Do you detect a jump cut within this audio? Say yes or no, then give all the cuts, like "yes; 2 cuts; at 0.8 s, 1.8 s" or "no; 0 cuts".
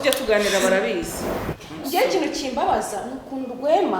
no; 0 cuts